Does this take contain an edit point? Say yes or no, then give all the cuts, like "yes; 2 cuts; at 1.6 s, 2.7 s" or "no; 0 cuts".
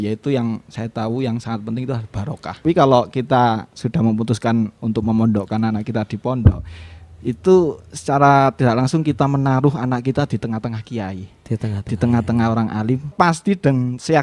yes; 2 cuts; at 2.6 s, 13.1 s